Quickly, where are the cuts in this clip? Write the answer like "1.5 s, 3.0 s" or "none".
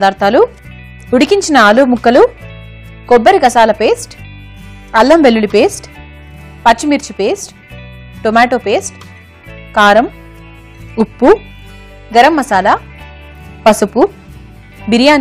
none